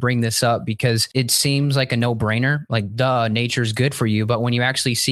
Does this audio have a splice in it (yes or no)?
yes